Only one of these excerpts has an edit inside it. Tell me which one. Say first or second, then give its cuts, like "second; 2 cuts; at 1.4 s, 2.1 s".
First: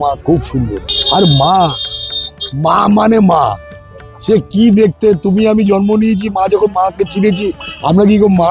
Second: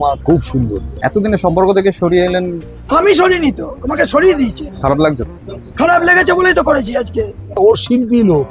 second; 3 cuts; at 0.9 s, 4.7 s, 7.6 s